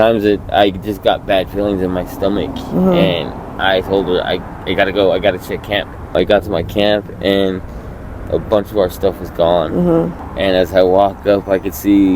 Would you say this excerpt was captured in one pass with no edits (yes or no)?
no